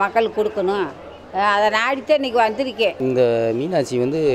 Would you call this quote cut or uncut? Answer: cut